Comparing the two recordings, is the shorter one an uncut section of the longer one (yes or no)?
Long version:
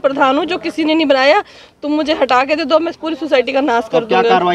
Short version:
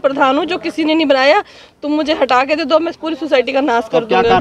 yes